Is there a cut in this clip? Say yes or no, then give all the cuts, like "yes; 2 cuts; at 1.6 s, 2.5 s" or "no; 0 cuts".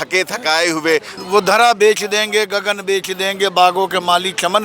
yes; 1 cut; at 1.2 s